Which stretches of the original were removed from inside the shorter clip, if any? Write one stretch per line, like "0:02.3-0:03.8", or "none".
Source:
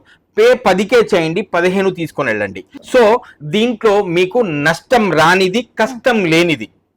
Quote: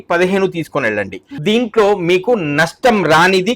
0:02.7-0:03.4

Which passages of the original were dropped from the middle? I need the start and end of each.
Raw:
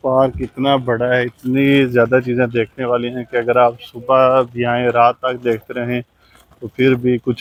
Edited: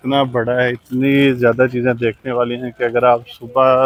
none

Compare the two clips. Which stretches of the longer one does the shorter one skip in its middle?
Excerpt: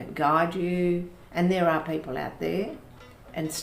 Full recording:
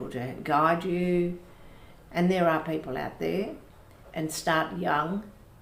0:01.5-0:02.0

